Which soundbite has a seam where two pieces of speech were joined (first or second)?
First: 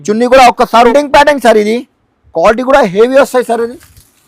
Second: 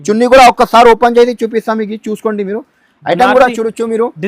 first